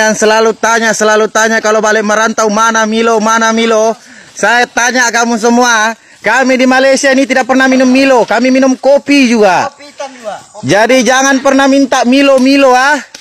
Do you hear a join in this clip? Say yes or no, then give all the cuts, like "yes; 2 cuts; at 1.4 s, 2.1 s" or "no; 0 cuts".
no; 0 cuts